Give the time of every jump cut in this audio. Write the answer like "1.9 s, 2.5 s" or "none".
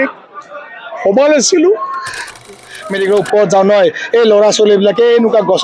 2.5 s